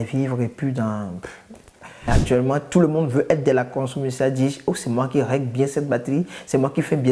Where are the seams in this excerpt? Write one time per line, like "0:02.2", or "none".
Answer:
0:02.1